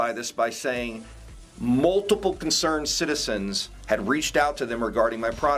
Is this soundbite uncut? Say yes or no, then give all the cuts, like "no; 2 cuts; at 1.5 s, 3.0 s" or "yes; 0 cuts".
yes; 0 cuts